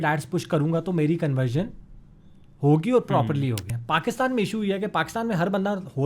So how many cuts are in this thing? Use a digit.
1